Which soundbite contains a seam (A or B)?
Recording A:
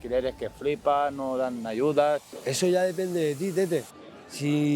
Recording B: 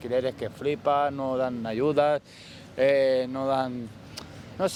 A